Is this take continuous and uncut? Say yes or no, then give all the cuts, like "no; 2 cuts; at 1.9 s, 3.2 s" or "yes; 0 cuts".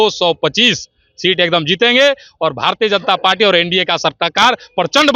yes; 0 cuts